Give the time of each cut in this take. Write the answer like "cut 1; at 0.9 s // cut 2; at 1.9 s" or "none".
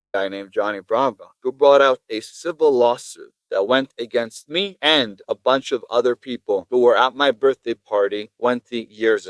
none

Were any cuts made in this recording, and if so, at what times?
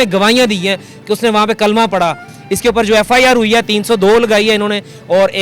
cut 1; at 2.3 s

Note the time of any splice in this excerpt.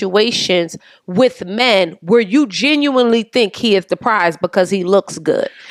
none

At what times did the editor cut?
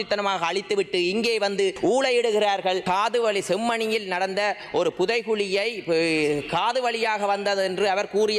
cut 1; at 1.8 s // cut 2; at 2.8 s

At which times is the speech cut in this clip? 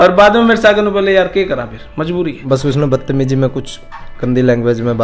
cut 1; at 2.4 s

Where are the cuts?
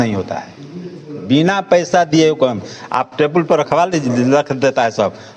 none

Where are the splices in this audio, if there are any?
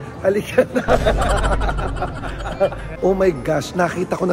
cut 1; at 2.9 s

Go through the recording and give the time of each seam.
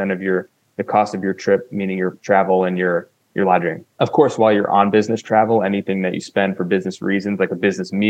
cut 1; at 2.2 s // cut 2; at 3.8 s

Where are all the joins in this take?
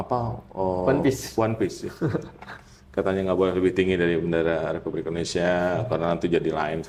none

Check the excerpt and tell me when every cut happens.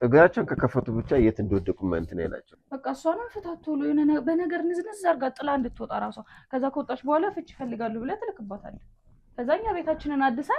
cut 1; at 2.4 s

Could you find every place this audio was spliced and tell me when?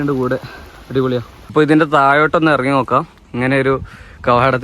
cut 1; at 1.5 s

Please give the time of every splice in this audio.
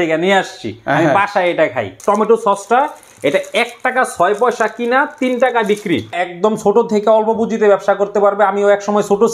cut 1; at 1.9 s // cut 2; at 6.2 s

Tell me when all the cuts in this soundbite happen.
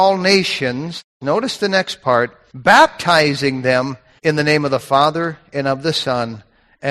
cut 1; at 1.0 s // cut 2; at 2.4 s // cut 3; at 4.0 s

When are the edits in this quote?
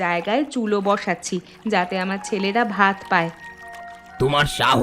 none

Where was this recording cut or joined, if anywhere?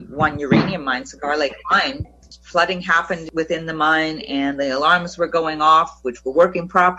cut 1; at 2.1 s // cut 2; at 3.2 s

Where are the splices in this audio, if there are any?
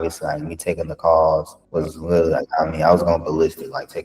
cut 1; at 1.6 s

